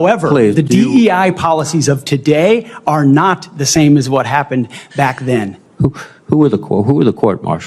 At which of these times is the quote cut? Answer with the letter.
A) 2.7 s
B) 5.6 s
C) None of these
B